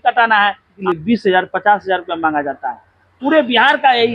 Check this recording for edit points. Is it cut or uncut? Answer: cut